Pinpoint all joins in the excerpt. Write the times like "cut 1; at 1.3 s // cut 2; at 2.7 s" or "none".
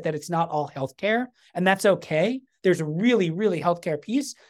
none